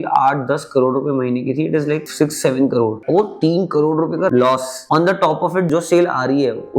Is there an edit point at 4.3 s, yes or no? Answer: yes